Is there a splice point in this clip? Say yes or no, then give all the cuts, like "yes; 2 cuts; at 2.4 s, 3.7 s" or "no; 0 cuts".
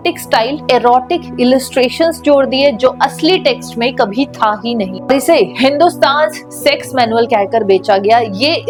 no; 0 cuts